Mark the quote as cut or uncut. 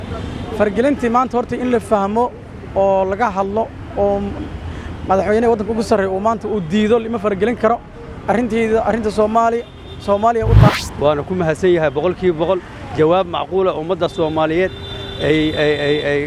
cut